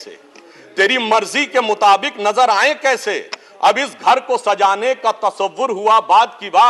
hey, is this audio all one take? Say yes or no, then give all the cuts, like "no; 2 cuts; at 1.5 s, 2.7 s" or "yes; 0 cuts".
yes; 0 cuts